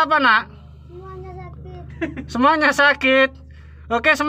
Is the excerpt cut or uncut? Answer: uncut